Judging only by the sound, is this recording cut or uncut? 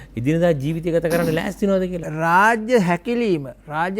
cut